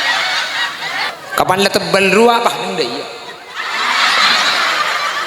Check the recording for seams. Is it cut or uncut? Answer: cut